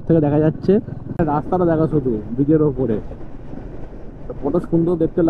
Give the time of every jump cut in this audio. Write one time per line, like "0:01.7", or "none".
0:01.2